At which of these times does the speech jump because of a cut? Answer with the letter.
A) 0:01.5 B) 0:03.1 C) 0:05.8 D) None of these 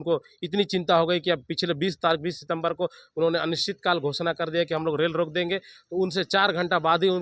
D